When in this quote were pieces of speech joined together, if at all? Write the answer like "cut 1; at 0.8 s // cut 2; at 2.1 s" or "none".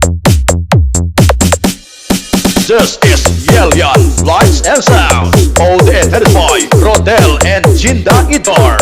cut 1; at 1.2 s